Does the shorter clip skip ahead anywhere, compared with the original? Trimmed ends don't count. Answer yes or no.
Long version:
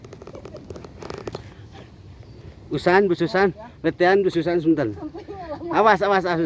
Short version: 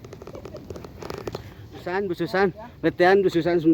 yes